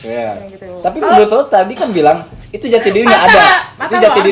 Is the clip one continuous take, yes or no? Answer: yes